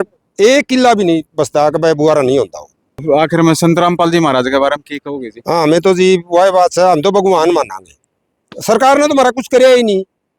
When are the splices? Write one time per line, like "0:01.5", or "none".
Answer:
0:03.0